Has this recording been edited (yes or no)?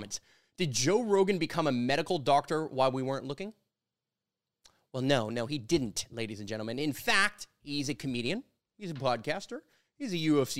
no